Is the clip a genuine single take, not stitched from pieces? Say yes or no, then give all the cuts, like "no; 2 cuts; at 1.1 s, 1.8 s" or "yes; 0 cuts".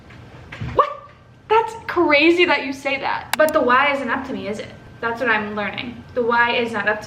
no; 1 cut; at 3.3 s